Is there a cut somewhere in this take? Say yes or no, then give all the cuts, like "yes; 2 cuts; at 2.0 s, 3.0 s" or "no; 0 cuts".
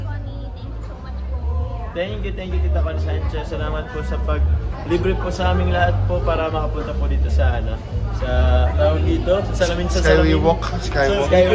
no; 0 cuts